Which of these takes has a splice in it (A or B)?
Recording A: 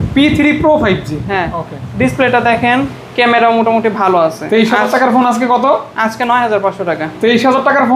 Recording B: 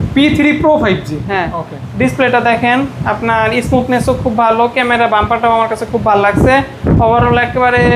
A